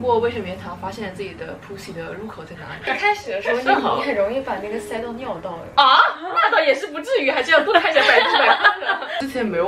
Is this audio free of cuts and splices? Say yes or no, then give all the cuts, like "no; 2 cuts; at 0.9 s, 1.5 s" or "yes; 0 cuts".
yes; 0 cuts